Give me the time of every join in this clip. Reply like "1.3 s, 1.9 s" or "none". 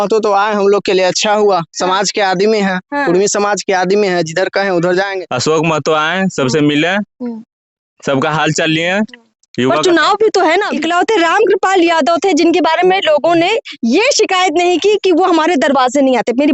5.2 s, 10.7 s